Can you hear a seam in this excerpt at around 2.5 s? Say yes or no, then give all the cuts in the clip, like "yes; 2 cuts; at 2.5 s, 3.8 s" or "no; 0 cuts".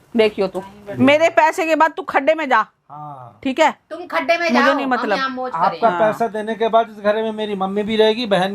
no; 1 cut; at 0.9 s